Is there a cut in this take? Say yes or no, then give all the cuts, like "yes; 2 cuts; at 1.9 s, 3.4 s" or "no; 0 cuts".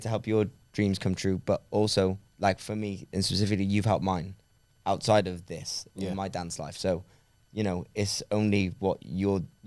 no; 0 cuts